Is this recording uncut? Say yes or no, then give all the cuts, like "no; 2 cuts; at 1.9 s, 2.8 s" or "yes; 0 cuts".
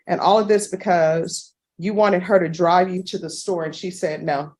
yes; 0 cuts